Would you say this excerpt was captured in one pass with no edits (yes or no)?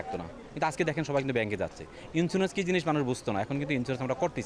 yes